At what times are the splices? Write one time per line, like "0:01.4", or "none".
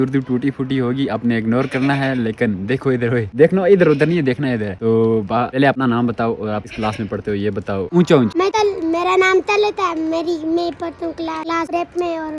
none